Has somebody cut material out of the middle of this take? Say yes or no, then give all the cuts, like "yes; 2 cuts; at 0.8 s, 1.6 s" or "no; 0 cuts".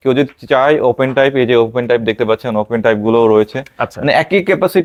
no; 0 cuts